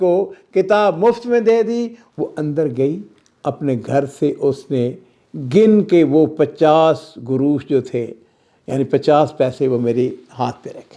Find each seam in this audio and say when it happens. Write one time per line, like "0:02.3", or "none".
0:02.0